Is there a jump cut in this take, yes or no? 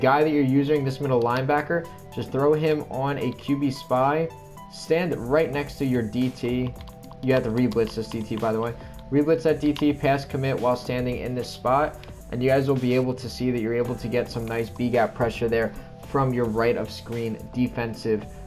no